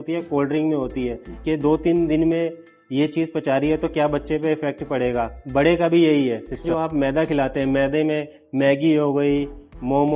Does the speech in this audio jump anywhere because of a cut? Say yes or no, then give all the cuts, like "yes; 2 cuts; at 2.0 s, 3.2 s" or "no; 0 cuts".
yes; 2 cuts; at 1.3 s, 6.7 s